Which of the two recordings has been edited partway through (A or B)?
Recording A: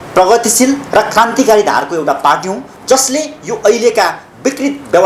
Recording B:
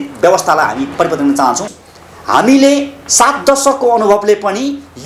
B